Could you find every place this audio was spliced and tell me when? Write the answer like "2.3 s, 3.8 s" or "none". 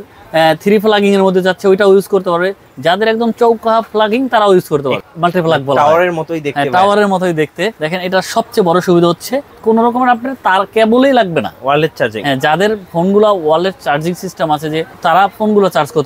5.0 s, 7.8 s, 9.5 s, 14.9 s